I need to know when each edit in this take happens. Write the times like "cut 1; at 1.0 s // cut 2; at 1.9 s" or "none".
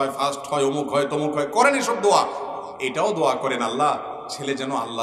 none